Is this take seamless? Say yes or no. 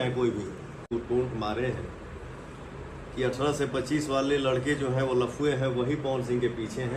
no